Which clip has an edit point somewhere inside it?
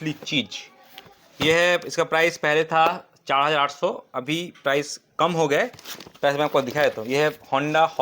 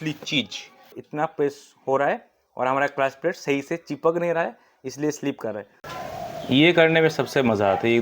second; 2 cuts; at 1.0 s, 5.7 s

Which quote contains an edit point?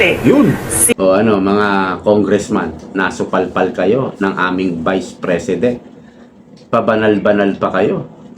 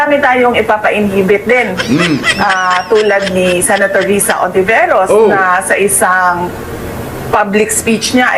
first; 1 cut; at 0.9 s

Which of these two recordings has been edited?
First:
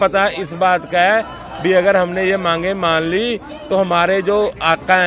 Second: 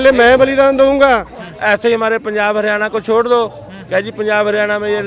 second; 1 cut; at 1.4 s

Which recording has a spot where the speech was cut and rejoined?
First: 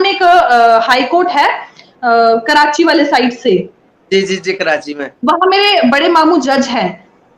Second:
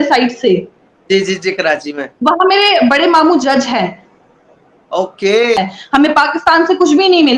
second; 1 cut; at 5.6 s

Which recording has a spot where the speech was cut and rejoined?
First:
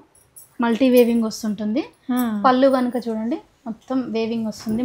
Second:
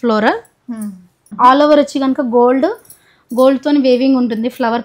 second; 1 cut; at 1.2 s

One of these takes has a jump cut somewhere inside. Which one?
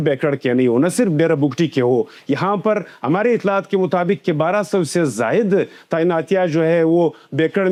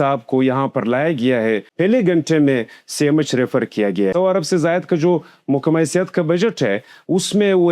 second; 2 cuts; at 1.7 s, 4.1 s

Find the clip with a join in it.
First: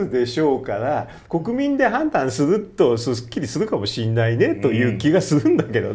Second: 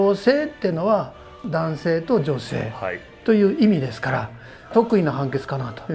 second; 1 cut; at 4.7 s

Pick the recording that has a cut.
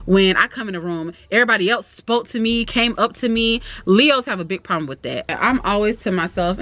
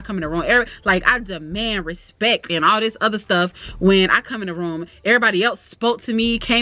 first; 1 cut; at 5.3 s

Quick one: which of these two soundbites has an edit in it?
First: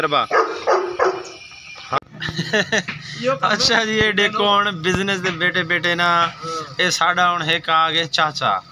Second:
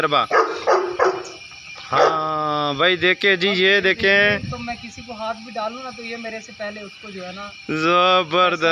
first; 1 cut; at 2.0 s

